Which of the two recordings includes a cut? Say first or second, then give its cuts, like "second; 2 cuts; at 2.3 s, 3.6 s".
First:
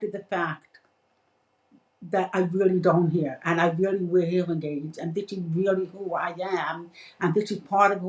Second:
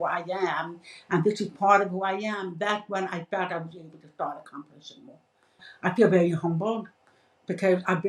second; 1 cut; at 5.7 s